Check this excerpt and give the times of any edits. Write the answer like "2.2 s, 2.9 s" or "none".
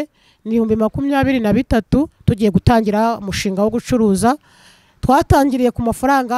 2.2 s